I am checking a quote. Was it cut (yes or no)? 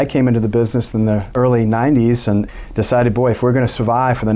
no